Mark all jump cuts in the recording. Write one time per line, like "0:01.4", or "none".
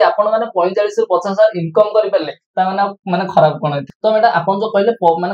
0:03.9